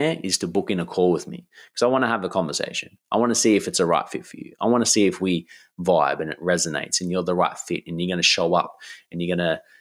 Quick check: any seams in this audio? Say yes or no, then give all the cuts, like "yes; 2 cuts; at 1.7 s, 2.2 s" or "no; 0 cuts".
no; 0 cuts